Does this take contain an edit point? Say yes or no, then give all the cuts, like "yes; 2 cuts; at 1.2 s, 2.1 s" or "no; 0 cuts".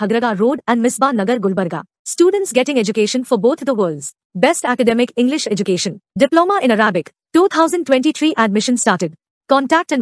no; 0 cuts